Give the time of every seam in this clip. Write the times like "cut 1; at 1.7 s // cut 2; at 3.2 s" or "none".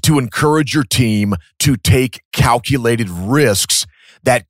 cut 1; at 1.5 s

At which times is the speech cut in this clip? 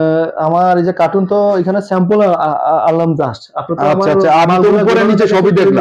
none

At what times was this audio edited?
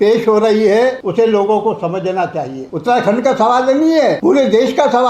cut 1; at 1.0 s // cut 2; at 2.6 s // cut 3; at 4.2 s

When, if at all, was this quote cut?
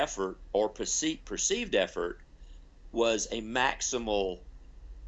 none

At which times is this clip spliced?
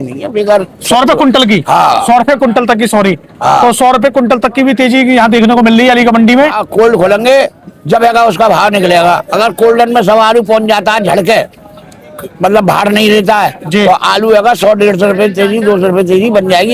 cut 1; at 6.6 s

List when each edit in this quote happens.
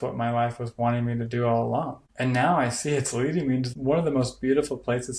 cut 1; at 2.0 s // cut 2; at 3.7 s

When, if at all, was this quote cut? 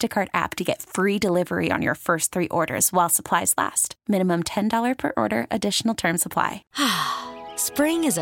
cut 1; at 6.6 s

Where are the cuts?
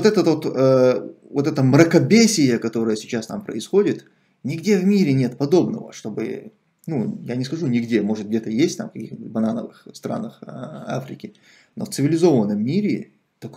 none

